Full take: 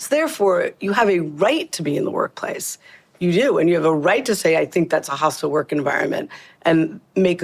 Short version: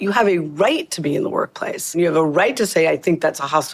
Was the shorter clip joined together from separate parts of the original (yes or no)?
yes